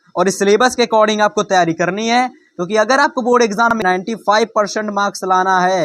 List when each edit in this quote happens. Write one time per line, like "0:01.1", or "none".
0:03.7